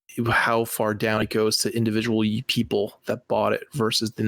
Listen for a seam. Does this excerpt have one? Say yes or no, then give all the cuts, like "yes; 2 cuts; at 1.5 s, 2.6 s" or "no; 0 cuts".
no; 0 cuts